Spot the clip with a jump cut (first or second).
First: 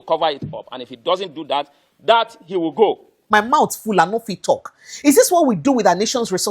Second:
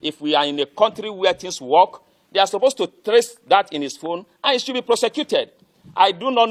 first